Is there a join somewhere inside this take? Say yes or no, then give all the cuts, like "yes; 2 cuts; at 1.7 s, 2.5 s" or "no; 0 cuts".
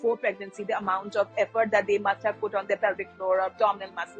no; 0 cuts